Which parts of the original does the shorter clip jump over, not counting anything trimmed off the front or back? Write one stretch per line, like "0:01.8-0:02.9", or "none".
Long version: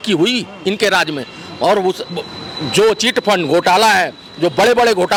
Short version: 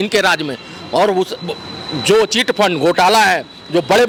none